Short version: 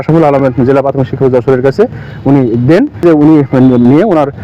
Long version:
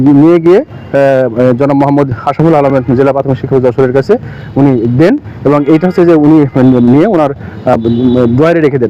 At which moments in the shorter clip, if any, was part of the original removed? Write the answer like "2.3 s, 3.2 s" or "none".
3.0 s